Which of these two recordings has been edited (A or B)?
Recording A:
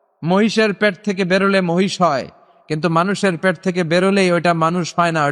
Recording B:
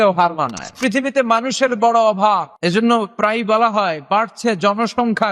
B